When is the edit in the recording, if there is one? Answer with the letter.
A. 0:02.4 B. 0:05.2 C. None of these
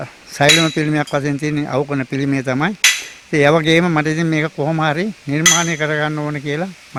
C